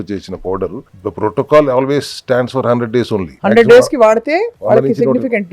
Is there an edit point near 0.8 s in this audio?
yes; 3 cuts; at 0.8 s, 3.3 s, 4.5 s

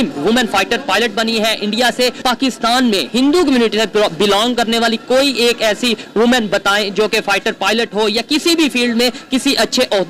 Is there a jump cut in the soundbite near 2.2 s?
yes; 1 cut; at 2.2 s

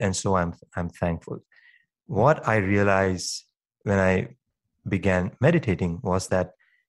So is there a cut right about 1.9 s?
no; 1 cut; at 4.7 s

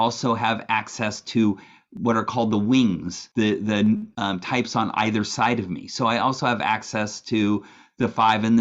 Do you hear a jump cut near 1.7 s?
no; 2 cuts; at 3.2 s, 4.1 s

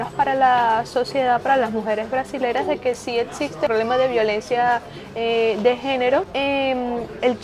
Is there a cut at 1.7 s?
no; 2 cuts; at 3.7 s, 6.3 s

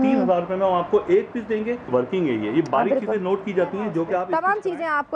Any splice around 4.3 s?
yes; 2 cuts; at 1.9 s, 4.3 s

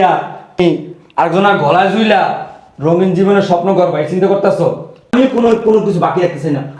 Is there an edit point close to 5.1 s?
yes; 1 cut; at 5.1 s

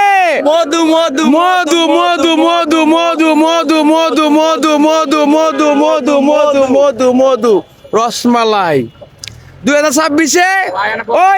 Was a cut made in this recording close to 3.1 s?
no; 0 cuts

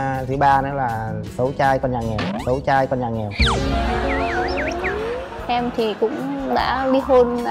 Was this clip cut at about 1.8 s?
no; 1 cut; at 5.2 s

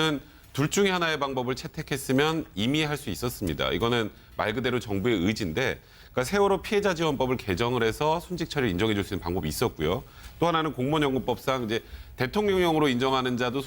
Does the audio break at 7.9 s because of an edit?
yes; 1 cut; at 7.9 s

